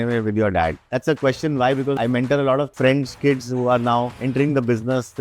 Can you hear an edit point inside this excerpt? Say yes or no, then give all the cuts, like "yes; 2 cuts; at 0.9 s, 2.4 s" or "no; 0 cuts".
yes; 4 cuts; at 0.9 s, 2.0 s, 2.7 s, 4.2 s